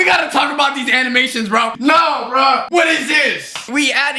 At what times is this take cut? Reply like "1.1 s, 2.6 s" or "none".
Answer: none